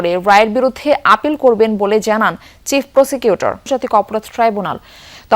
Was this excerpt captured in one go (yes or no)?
no